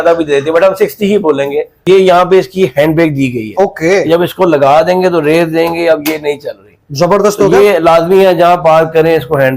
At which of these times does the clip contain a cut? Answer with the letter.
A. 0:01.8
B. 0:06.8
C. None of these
A